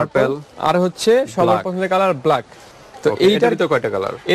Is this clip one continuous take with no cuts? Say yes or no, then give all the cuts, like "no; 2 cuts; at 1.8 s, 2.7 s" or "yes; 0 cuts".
no; 1 cut; at 2.6 s